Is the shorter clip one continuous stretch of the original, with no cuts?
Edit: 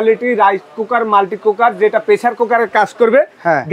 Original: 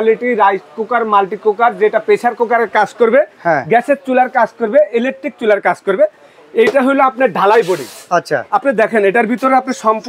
yes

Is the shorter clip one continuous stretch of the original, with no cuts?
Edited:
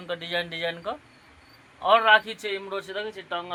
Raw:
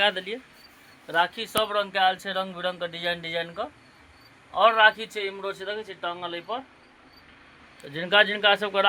yes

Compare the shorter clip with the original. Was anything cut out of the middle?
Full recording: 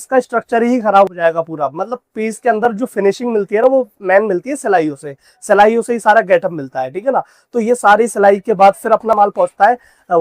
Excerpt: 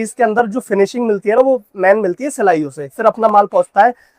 yes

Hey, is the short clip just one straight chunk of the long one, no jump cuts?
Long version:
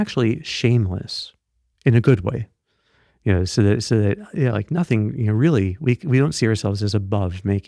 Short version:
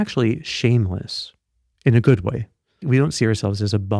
no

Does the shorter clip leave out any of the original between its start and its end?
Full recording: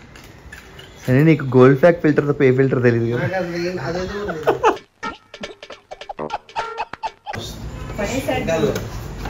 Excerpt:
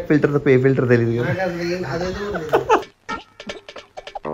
no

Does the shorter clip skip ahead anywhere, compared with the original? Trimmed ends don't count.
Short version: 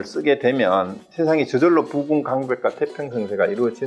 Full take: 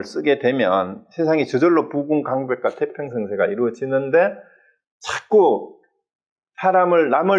no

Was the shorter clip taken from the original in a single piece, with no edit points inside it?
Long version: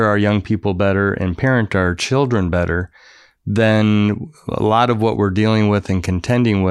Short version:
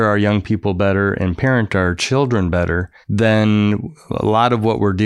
no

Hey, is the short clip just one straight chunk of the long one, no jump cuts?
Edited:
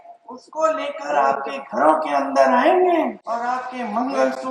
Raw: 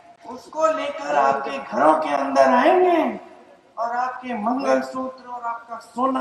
no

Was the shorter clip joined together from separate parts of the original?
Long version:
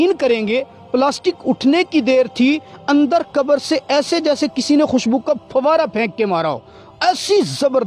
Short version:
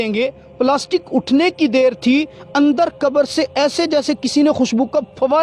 no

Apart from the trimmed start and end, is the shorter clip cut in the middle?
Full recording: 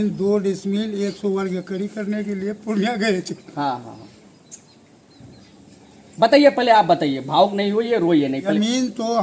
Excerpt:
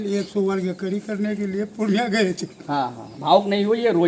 yes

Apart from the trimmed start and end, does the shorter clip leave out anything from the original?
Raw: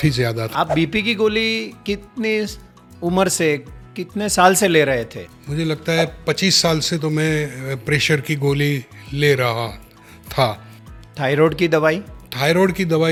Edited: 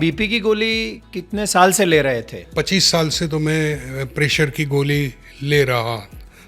yes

